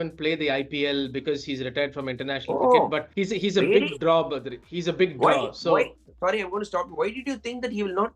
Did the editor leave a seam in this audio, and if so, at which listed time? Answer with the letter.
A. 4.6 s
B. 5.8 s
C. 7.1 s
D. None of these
D